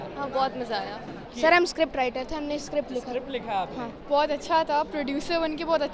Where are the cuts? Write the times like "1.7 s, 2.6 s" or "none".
1.2 s, 4.0 s